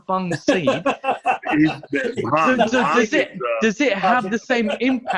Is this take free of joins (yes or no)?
yes